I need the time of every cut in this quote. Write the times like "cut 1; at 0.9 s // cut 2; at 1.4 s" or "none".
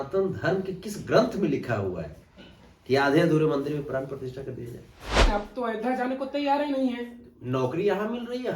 cut 1; at 5.3 s